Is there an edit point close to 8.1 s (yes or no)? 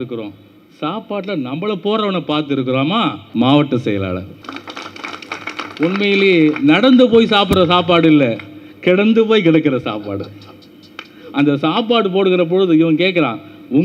no